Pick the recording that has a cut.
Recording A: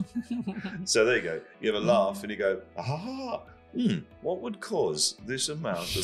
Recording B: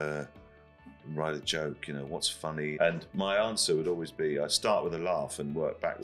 B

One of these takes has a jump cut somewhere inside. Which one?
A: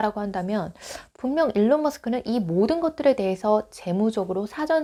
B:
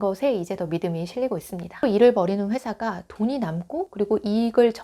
B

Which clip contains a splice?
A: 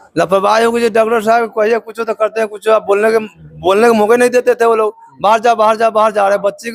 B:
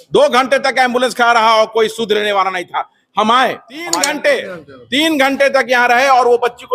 B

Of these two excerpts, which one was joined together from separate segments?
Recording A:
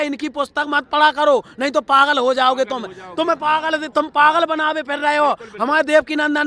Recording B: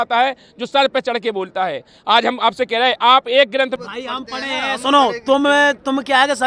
B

